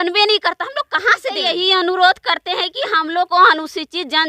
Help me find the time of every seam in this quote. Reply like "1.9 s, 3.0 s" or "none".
1.4 s